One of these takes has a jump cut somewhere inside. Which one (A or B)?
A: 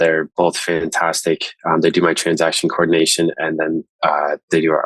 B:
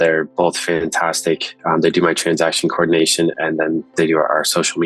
B